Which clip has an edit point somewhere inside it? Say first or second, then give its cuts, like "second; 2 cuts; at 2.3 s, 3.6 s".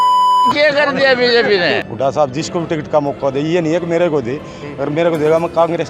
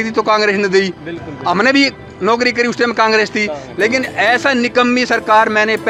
first; 1 cut; at 1.9 s